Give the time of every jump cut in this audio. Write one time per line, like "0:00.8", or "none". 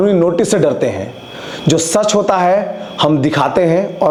none